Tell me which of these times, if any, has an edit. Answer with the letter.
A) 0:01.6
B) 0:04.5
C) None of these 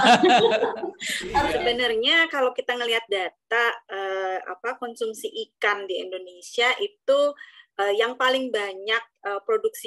A